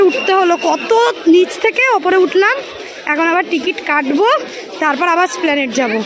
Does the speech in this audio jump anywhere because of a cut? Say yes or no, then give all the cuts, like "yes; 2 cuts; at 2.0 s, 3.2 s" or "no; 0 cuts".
no; 0 cuts